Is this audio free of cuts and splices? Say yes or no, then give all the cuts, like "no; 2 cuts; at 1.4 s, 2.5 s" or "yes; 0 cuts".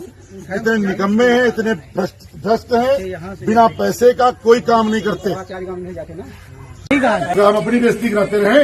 no; 1 cut; at 7.3 s